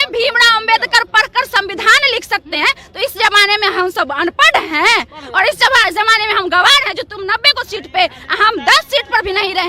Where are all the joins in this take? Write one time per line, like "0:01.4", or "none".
none